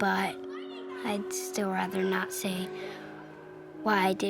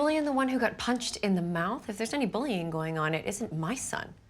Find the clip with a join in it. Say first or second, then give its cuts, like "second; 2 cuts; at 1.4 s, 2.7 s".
second; 1 cut; at 1.9 s